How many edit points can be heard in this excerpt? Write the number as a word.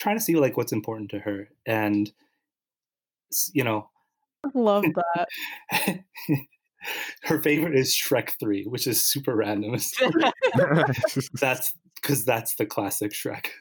one